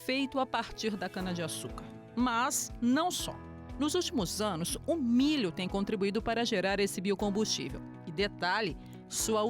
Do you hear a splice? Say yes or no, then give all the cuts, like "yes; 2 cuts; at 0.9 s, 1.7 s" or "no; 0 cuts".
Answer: no; 0 cuts